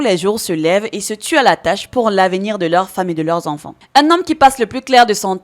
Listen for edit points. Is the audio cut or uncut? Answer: cut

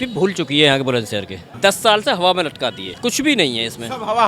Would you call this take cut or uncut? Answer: cut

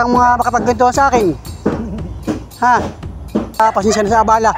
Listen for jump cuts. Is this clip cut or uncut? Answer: cut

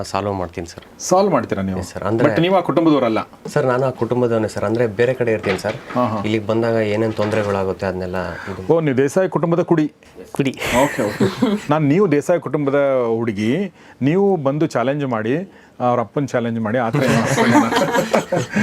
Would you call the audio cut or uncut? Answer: uncut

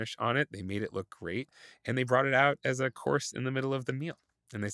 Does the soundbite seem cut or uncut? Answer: uncut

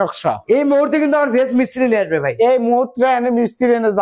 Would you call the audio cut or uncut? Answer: uncut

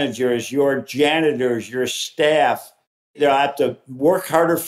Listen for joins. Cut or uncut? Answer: cut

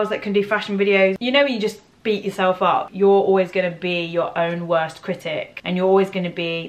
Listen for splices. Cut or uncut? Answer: cut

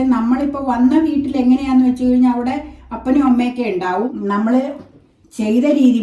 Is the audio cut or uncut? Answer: cut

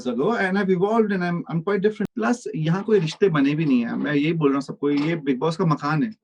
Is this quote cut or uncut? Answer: cut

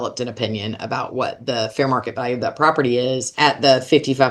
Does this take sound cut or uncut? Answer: cut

